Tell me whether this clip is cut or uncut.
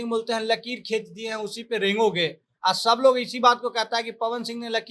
uncut